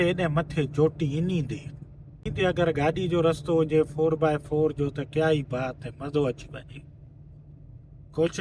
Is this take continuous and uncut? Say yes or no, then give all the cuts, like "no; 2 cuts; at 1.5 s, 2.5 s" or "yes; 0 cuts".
no; 1 cut; at 2.3 s